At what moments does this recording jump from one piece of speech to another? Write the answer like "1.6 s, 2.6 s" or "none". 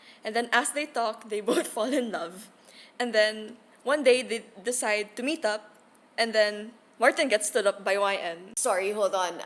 8.4 s